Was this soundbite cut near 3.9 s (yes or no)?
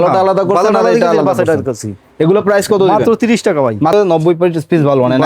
yes